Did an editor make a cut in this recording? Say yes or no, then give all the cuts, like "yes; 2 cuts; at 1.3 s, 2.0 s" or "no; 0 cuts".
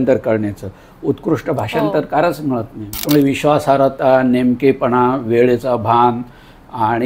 yes; 1 cut; at 2.8 s